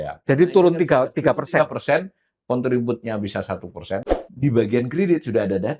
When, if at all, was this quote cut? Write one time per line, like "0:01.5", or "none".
0:04.0